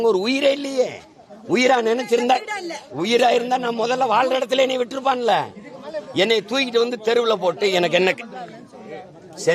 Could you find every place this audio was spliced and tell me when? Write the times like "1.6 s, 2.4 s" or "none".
none